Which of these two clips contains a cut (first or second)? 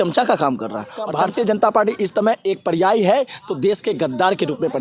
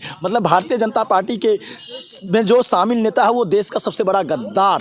first